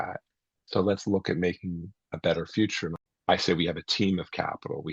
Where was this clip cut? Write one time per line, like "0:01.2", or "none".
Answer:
0:03.0